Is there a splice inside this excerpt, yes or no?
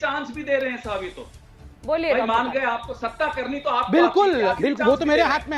no